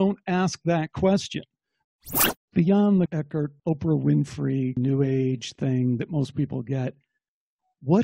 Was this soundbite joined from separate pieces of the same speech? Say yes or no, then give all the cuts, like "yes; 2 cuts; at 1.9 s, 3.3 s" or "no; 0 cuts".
yes; 3 cuts; at 1.8 s, 3.2 s, 4.8 s